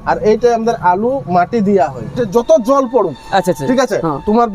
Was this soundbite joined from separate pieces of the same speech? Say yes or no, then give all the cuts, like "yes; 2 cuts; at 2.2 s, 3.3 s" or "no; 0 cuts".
yes; 1 cut; at 2.0 s